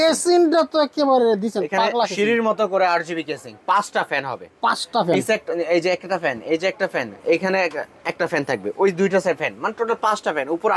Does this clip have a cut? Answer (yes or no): no